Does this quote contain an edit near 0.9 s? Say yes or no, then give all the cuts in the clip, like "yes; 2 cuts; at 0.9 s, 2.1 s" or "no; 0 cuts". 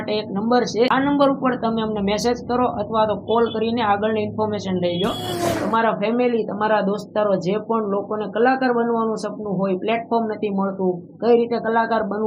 yes; 2 cuts; at 0.9 s, 5.5 s